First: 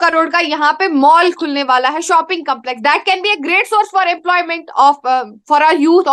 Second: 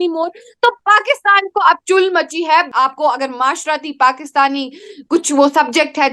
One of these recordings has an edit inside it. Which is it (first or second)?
second